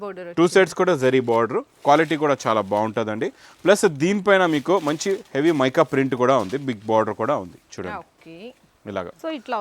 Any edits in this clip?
no; 0 cuts

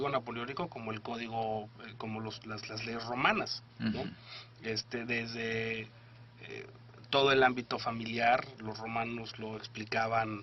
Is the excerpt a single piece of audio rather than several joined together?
no; 1 cut; at 1.8 s

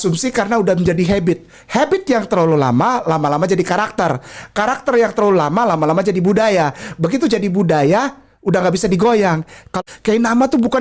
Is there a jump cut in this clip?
yes; 1 cut; at 9.7 s

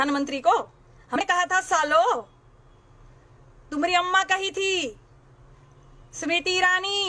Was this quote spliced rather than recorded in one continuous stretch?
yes; 1 cut; at 1.2 s

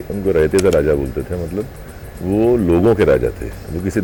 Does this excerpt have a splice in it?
no; 0 cuts

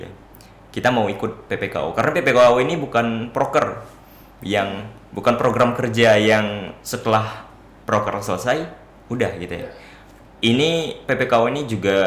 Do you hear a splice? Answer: no; 0 cuts

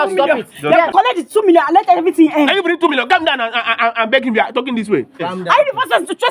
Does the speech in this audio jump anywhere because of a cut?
yes; 2 cuts; at 0.9 s, 5.2 s

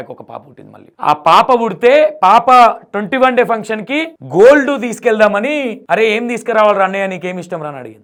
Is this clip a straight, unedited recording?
yes; 0 cuts

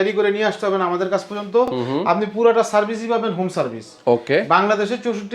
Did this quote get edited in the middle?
no; 0 cuts

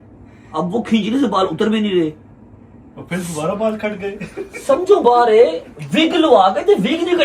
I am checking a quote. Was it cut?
no; 0 cuts

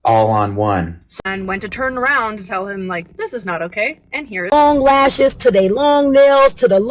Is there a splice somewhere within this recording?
yes; 2 cuts; at 1.0 s, 4.5 s

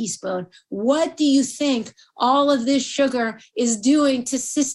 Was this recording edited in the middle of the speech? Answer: no; 0 cuts

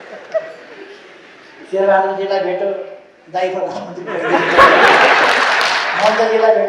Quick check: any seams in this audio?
no; 0 cuts

